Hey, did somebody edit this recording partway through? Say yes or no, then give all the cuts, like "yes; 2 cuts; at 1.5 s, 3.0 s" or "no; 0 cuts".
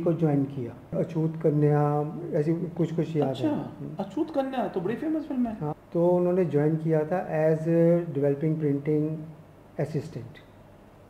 yes; 2 cuts; at 0.9 s, 5.7 s